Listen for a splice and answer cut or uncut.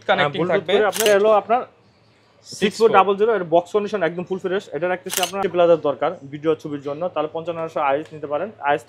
cut